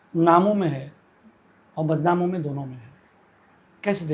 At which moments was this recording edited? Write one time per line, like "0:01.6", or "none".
none